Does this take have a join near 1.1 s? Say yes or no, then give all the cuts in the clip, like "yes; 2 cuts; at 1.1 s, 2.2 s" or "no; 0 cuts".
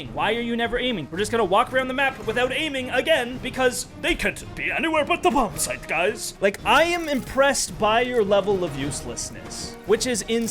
yes; 3 cuts; at 1.1 s, 3.4 s, 6.3 s